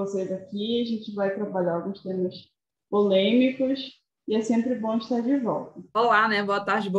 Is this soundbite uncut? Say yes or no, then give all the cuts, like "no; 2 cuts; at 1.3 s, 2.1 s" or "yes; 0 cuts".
no; 1 cut; at 5.8 s